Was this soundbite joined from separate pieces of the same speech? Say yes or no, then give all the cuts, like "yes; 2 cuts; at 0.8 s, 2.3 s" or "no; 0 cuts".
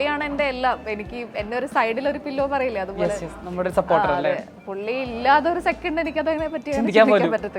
no; 0 cuts